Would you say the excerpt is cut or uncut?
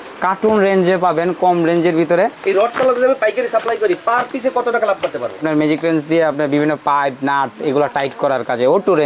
cut